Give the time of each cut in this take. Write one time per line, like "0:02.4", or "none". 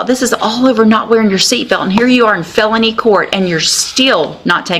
none